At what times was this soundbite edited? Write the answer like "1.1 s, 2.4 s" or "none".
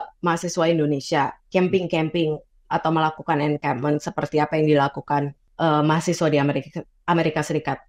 5.4 s